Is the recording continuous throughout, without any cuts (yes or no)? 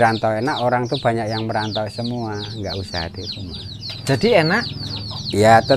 yes